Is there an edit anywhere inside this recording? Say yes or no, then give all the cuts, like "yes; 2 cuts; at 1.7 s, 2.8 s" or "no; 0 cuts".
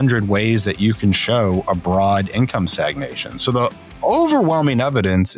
no; 0 cuts